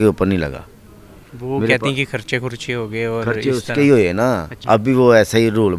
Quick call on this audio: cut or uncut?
cut